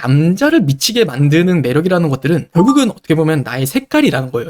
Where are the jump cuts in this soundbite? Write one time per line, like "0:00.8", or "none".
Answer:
none